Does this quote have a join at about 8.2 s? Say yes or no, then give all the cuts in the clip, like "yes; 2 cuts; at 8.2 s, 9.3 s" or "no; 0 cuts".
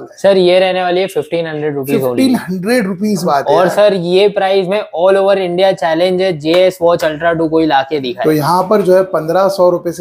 yes; 2 cuts; at 3.3 s, 8.2 s